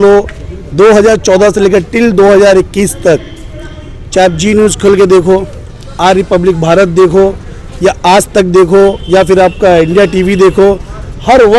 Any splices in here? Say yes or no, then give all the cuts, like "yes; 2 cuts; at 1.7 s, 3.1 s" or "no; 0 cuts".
no; 0 cuts